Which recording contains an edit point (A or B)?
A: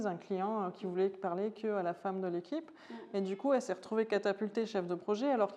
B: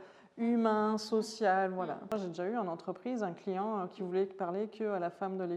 B